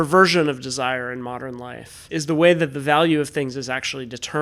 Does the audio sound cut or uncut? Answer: cut